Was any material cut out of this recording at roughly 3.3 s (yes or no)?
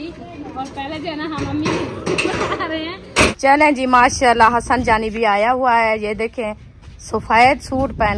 yes